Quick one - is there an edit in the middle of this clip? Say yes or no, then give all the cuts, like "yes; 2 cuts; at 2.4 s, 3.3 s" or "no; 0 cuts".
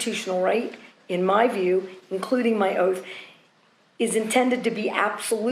no; 0 cuts